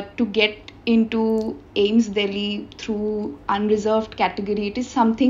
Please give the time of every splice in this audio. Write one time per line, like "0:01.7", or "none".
none